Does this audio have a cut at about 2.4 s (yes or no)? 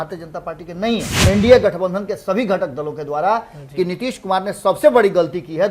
no